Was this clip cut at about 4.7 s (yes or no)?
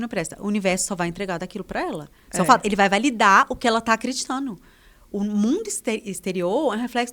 no